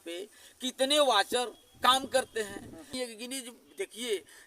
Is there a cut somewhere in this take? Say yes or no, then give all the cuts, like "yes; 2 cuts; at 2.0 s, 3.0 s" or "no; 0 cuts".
yes; 1 cut; at 2.9 s